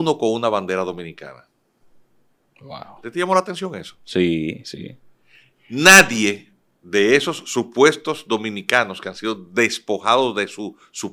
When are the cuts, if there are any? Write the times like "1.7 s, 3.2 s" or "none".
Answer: none